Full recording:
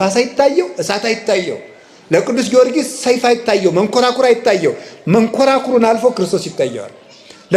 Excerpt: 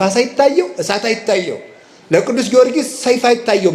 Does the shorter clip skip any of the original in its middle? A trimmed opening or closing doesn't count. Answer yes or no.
no